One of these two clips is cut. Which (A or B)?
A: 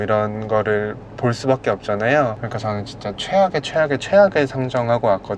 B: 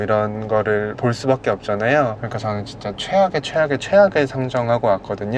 B